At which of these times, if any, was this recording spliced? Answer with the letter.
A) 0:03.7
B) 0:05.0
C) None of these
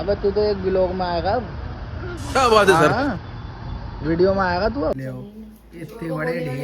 B